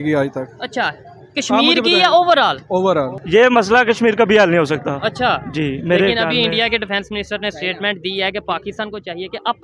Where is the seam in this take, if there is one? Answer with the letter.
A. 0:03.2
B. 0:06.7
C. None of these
A